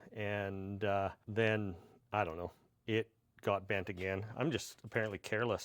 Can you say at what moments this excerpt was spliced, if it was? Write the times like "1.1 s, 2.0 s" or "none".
1.2 s